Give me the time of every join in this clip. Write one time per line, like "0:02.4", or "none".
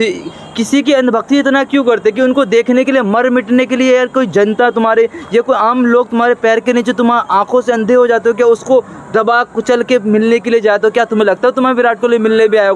none